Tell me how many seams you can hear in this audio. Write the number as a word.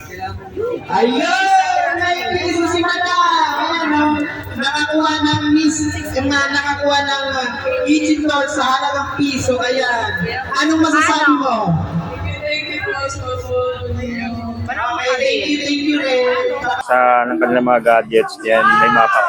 one